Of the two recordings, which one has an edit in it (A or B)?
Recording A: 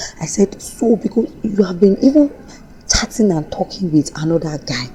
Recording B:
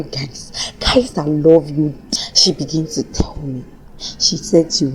B